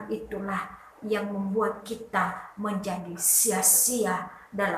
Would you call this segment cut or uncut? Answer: uncut